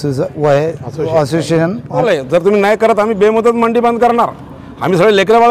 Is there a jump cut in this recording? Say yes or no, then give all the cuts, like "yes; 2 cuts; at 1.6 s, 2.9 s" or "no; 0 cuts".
yes; 1 cut; at 2.0 s